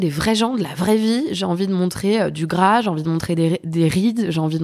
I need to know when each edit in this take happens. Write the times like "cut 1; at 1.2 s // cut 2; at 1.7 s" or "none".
none